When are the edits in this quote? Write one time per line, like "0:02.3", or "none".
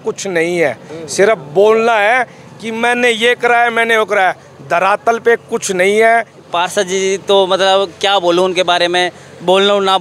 0:06.4